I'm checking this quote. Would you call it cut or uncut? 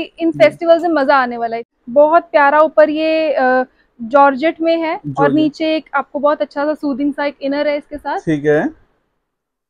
cut